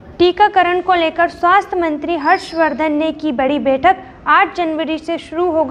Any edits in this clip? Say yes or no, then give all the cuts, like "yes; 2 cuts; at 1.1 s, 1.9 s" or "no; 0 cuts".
no; 0 cuts